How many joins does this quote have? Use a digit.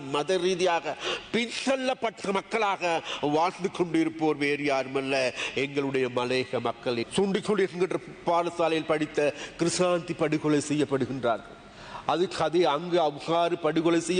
1